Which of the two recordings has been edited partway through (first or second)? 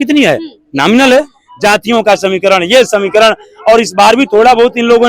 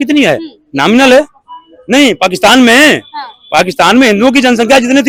first